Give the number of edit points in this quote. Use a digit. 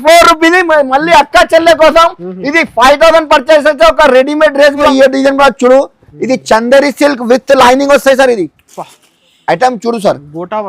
1